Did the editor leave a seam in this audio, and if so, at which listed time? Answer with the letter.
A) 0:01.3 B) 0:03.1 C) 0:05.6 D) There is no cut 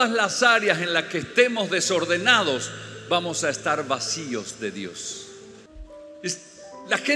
C